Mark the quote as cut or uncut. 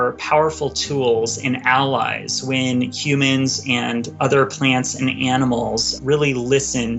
cut